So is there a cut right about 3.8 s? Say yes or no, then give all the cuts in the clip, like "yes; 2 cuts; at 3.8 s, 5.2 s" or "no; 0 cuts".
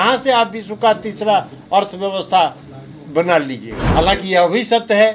yes; 1 cut; at 3.8 s